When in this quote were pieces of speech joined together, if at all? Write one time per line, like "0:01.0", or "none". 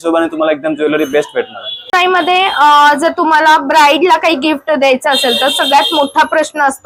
none